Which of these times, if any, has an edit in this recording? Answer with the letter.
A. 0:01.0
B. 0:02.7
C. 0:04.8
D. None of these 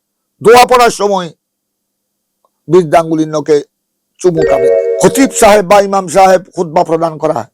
C